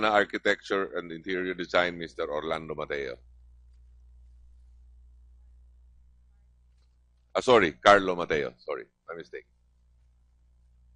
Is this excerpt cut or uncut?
uncut